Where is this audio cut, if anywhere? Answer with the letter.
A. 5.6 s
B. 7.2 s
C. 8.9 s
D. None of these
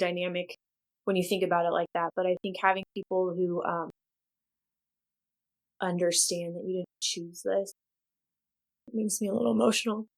C